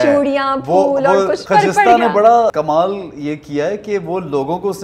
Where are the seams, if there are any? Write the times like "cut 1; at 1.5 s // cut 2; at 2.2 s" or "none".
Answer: cut 1; at 1.4 s // cut 2; at 2.5 s

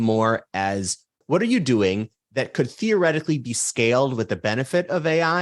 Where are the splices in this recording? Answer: cut 1; at 1.2 s

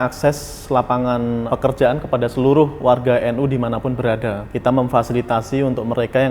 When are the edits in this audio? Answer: cut 1; at 1.4 s // cut 2; at 4.5 s

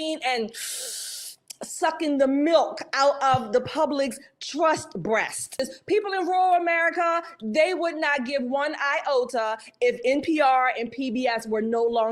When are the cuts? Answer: cut 1; at 5.6 s

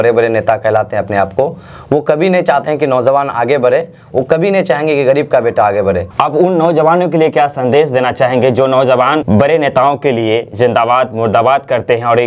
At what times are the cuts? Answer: cut 1; at 6.1 s

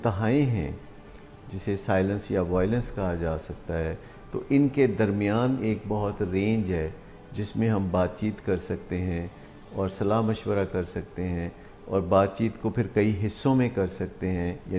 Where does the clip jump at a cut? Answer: none

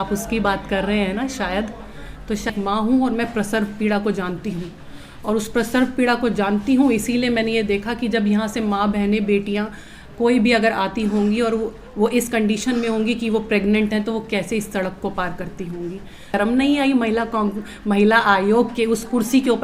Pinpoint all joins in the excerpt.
cut 1; at 2.5 s // cut 2; at 16.3 s

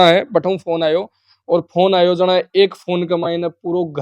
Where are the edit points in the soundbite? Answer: none

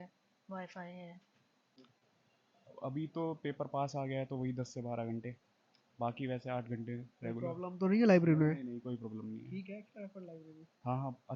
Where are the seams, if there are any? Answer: cut 1; at 1.8 s

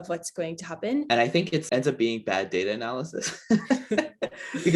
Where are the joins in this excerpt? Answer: cut 1; at 1.1 s

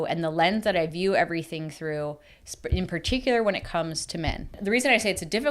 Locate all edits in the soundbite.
cut 1; at 4.6 s

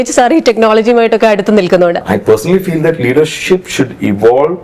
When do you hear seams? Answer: cut 1; at 2.0 s

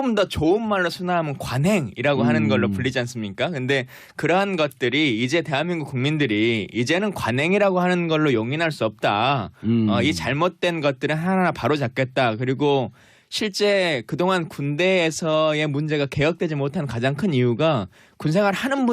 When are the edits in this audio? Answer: cut 1; at 1.5 s

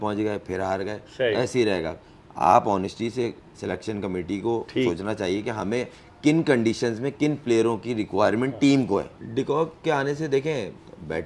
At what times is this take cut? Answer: cut 1; at 9.2 s

